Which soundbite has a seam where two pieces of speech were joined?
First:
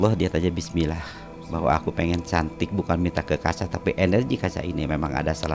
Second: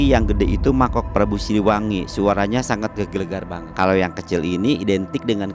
second; 1 cut; at 3.6 s

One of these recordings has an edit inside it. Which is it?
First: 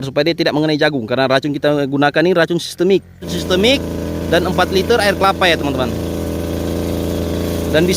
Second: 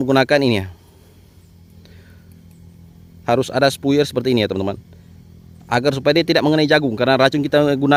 first; 1 cut; at 3.3 s

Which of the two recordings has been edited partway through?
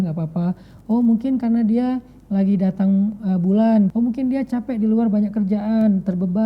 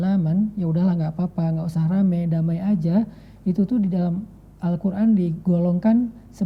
first; 1 cut; at 3.9 s

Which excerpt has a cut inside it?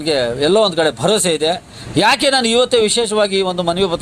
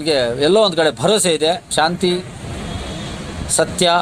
second; 1 cut; at 1.7 s

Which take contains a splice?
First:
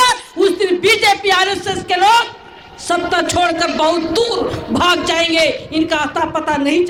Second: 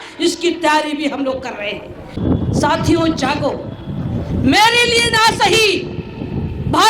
second; 1 cut; at 2.2 s

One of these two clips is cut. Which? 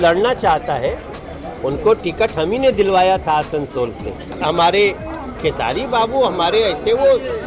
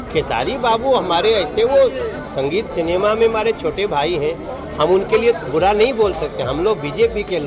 first; 1 cut; at 4.4 s

